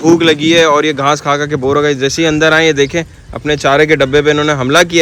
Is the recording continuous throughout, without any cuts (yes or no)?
yes